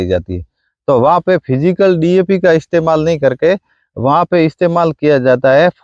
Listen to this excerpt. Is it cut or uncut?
uncut